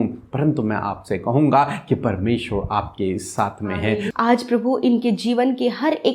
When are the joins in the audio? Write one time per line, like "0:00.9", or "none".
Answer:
0:04.1